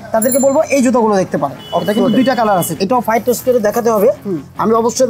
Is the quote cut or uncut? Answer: cut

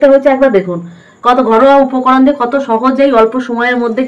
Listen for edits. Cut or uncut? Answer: uncut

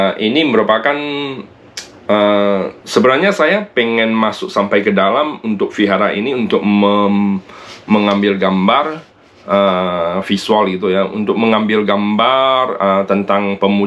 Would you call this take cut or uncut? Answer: uncut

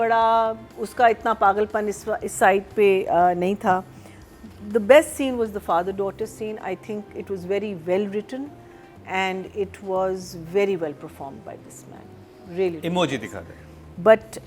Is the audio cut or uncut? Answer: uncut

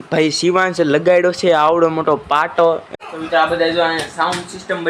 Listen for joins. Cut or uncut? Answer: cut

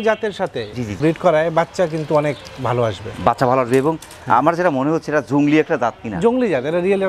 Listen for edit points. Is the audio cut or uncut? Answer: cut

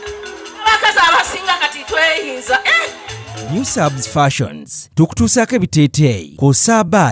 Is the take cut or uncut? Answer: cut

